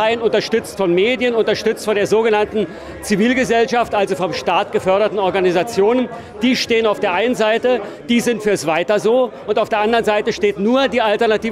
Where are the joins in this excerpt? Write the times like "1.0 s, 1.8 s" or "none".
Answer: none